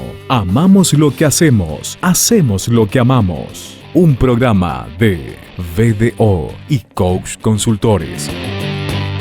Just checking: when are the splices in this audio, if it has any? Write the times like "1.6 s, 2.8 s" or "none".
8.2 s